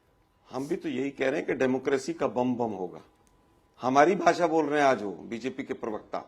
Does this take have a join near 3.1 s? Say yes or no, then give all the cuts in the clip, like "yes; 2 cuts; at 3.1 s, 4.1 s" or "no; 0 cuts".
no; 0 cuts